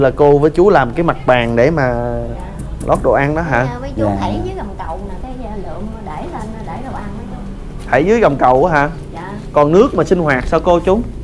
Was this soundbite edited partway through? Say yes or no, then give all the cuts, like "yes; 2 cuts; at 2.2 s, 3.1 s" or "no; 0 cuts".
no; 0 cuts